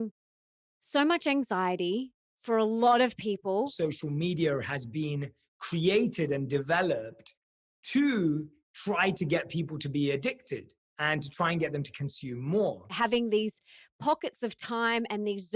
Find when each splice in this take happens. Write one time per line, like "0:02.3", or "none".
0:03.7
0:13.0